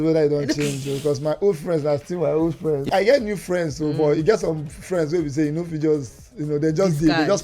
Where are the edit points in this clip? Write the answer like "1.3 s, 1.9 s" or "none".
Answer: 2.9 s

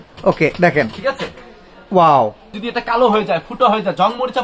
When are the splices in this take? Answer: 2.6 s

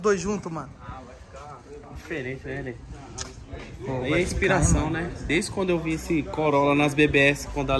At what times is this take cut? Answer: none

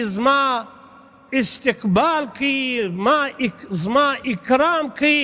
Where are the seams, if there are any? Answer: none

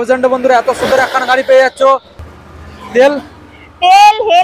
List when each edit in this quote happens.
2.2 s

